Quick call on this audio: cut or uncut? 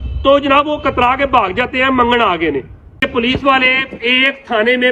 cut